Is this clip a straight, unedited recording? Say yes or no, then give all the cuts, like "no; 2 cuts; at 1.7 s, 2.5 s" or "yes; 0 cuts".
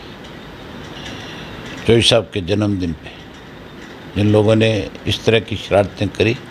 yes; 0 cuts